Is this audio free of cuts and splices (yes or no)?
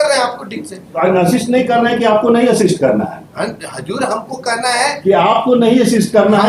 yes